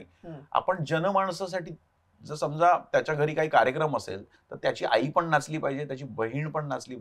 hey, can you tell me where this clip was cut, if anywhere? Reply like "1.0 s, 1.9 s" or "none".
none